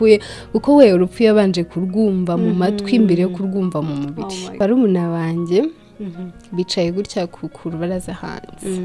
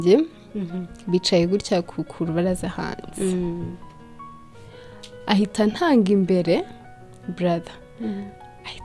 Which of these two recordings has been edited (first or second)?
first